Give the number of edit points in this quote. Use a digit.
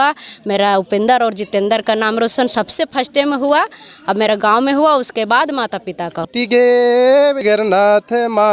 2